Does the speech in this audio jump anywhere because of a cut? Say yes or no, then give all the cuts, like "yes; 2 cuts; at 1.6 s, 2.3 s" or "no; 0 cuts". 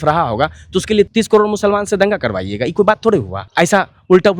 yes; 2 cuts; at 1.1 s, 3.4 s